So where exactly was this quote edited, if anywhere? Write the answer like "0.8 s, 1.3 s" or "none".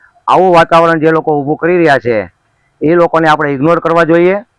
none